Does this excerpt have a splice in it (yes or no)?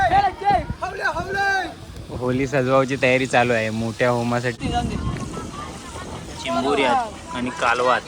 yes